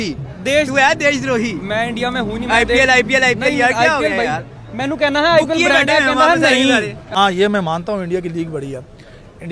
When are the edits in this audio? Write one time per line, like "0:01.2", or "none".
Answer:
0:07.0